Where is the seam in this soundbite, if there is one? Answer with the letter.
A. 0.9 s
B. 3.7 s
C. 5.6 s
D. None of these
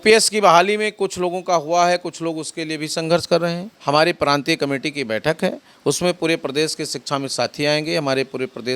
B